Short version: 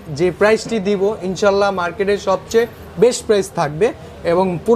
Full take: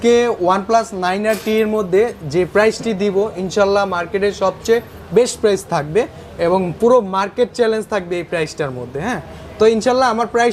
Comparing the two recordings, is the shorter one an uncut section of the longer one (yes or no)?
yes